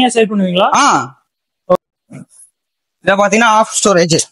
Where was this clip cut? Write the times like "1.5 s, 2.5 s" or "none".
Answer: 1.8 s

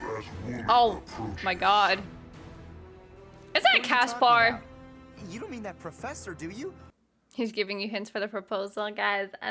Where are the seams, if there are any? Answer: 6.8 s

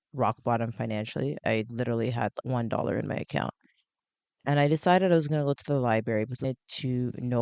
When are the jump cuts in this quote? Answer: 1.4 s, 2.4 s

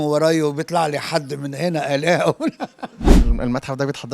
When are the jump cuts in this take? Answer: 3.2 s

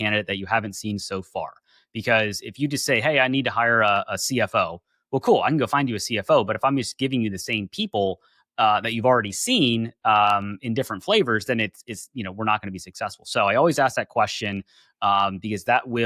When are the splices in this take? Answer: none

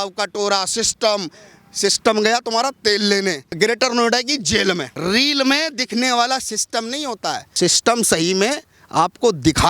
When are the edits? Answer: 3.5 s, 4.9 s, 7.5 s

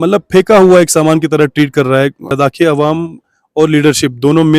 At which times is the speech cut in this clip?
2.3 s

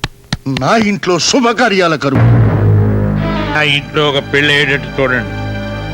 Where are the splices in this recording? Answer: 2.2 s, 3.6 s

